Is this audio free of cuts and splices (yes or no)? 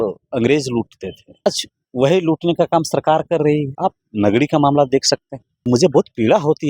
no